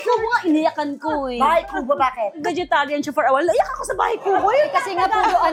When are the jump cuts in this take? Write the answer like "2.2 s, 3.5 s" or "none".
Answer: none